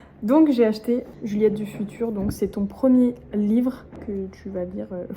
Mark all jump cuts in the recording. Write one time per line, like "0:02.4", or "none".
0:01.1
0:03.9